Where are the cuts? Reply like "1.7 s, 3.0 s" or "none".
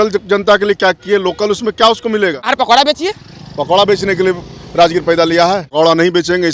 2.4 s, 5.7 s

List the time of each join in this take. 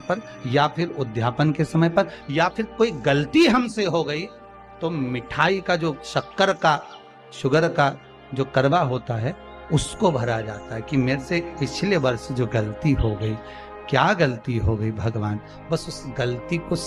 none

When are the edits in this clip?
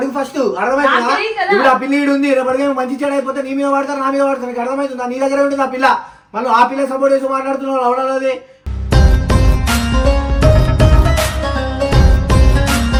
none

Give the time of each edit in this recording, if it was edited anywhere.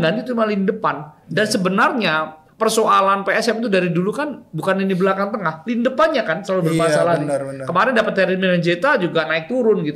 none

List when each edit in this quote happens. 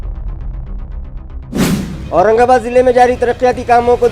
1.9 s

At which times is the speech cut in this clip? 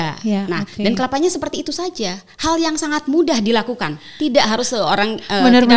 none

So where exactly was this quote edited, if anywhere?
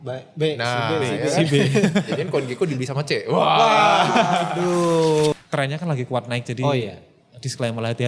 5.3 s

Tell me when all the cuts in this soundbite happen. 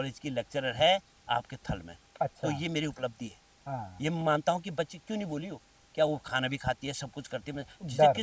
none

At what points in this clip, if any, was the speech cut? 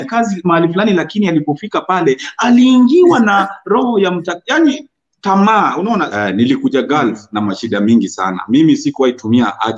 6.1 s

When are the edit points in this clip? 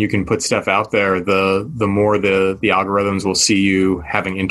none

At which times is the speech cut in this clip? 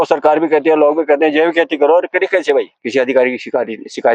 2.8 s

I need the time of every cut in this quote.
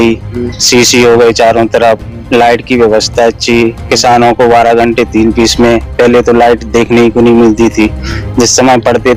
none

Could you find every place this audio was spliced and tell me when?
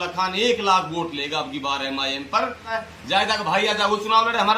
2.7 s

